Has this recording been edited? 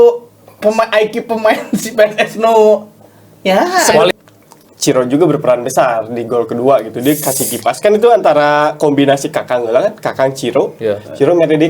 yes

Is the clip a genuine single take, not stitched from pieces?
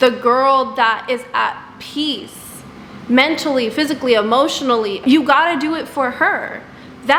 yes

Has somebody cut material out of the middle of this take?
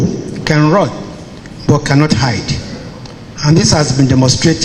no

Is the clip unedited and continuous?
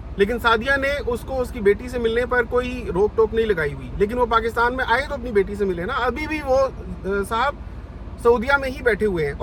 yes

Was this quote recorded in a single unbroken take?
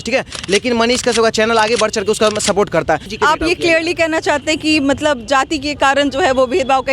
no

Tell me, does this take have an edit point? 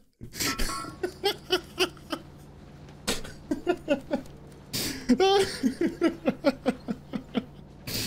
no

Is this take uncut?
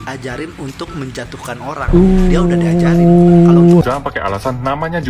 no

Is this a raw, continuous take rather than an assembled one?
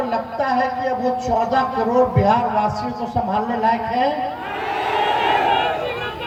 yes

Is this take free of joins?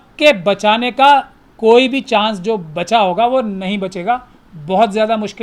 yes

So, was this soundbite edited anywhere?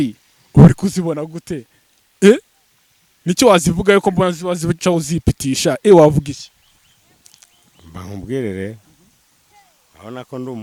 no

